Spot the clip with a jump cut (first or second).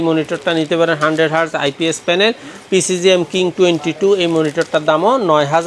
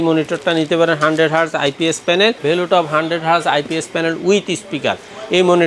second